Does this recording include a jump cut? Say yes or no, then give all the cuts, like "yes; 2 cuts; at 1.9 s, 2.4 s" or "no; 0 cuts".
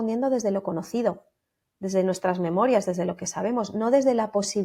no; 0 cuts